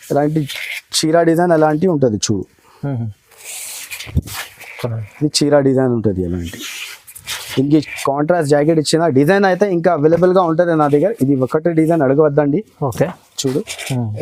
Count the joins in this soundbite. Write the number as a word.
zero